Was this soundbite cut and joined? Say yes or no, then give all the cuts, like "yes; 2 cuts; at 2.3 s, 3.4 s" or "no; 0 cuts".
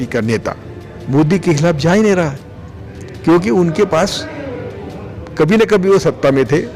no; 0 cuts